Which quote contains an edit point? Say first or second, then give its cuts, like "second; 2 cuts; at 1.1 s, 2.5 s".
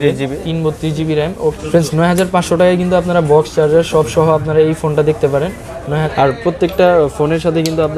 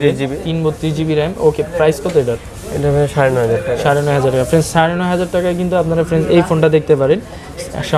first; 2 cuts; at 1.6 s, 6.0 s